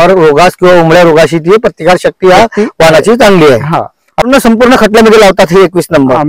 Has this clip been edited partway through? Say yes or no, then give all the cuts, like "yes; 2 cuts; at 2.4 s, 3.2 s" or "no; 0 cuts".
yes; 1 cut; at 4.3 s